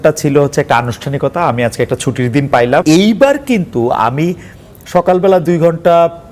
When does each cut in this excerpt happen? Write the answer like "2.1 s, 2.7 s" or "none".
2.8 s